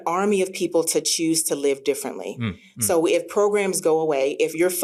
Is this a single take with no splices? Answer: yes; 0 cuts

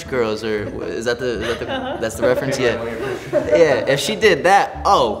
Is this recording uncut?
yes; 0 cuts

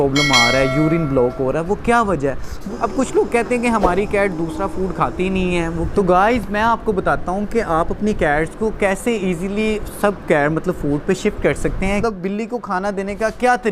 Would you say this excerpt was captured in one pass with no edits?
no; 3 cuts; at 2.6 s, 5.9 s, 12.0 s

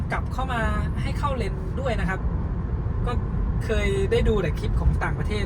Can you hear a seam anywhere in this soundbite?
no; 0 cuts

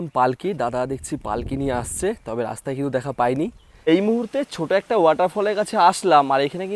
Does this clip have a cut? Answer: yes; 1 cut; at 3.7 s

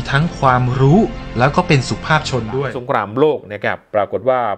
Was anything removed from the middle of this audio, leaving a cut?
yes; 1 cut; at 2.7 s

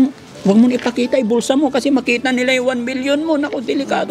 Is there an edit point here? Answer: no; 0 cuts

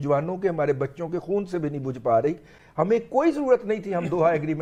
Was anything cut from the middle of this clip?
no; 0 cuts

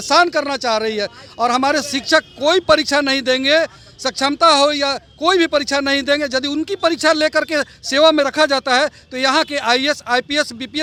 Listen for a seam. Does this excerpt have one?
no; 0 cuts

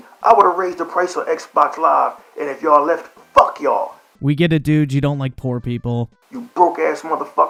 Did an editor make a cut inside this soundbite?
no; 0 cuts

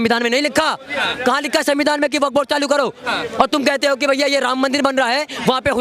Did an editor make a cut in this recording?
no; 0 cuts

